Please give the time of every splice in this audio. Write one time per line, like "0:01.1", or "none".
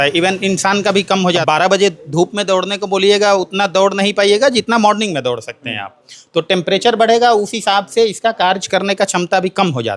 0:01.4

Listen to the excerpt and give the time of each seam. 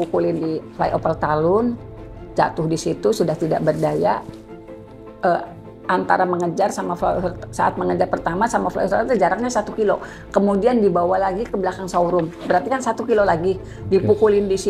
none

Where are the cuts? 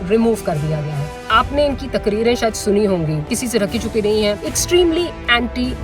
0:01.3
0:03.3
0:04.5

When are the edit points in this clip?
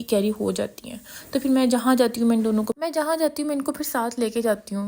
none

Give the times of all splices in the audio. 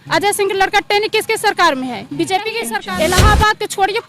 0:02.7

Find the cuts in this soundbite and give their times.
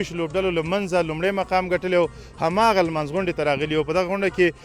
none

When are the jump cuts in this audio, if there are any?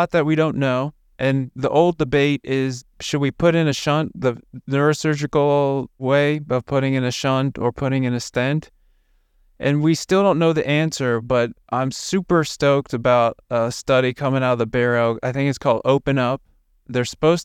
none

